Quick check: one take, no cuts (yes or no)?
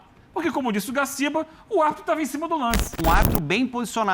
no